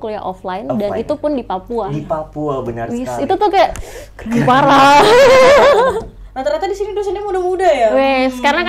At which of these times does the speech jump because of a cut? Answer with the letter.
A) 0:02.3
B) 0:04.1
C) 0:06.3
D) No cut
C